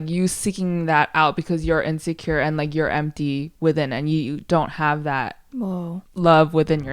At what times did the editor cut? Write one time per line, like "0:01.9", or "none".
0:06.0